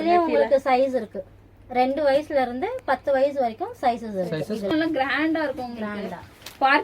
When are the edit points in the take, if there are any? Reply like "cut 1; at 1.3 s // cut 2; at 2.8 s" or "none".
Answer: cut 1; at 4.7 s